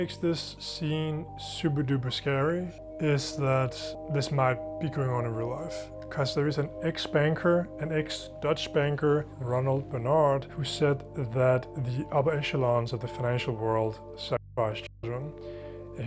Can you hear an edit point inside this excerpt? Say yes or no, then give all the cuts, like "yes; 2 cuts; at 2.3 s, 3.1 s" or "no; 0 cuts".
yes; 4 cuts; at 1.0 s, 4.0 s, 9.4 s, 10.6 s